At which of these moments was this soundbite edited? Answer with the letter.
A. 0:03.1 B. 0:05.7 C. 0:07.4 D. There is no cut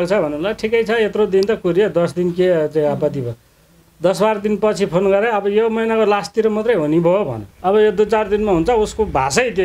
C